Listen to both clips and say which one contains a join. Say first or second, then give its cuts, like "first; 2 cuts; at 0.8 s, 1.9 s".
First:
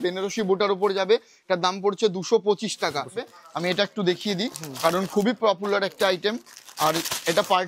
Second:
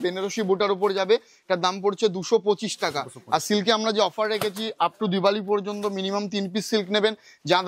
first; 1 cut; at 3.2 s